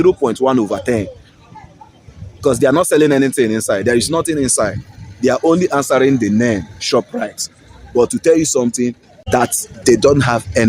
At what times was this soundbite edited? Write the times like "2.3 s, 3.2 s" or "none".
9.1 s